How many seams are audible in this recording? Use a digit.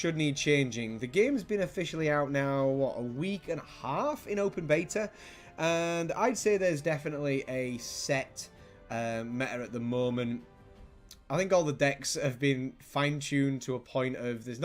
1